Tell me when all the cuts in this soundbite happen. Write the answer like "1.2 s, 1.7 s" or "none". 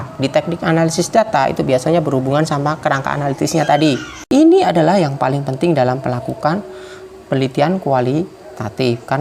4.2 s